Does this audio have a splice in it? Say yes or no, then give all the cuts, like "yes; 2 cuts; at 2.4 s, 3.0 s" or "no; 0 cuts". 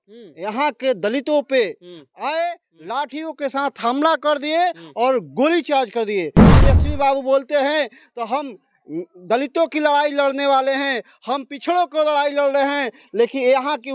yes; 1 cut; at 6.4 s